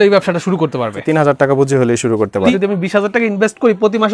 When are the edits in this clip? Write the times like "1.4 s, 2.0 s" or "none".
1.0 s, 2.5 s